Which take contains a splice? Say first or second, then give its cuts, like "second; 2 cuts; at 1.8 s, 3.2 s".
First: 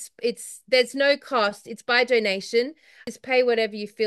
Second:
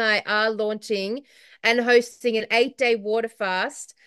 first; 1 cut; at 3.0 s